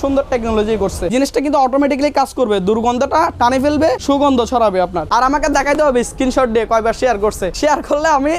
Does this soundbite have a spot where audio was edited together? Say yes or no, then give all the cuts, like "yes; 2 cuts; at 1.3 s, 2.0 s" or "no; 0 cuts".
yes; 4 cuts; at 1.1 s, 4.0 s, 5.0 s, 7.5 s